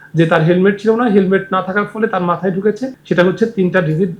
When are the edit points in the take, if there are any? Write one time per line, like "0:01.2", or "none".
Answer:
0:02.9